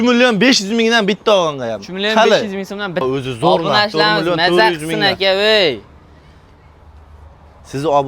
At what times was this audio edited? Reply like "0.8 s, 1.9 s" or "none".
3.0 s